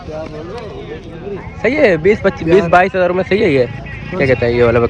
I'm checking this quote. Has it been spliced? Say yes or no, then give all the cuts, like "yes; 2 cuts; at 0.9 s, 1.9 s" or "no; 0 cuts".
no; 0 cuts